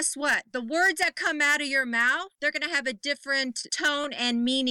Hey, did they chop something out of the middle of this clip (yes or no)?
yes